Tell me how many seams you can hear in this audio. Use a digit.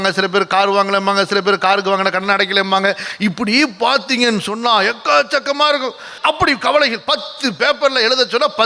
1